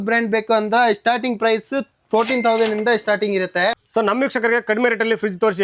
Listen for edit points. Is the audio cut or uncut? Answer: cut